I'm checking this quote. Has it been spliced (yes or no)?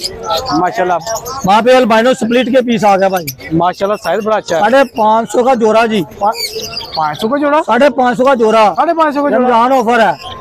no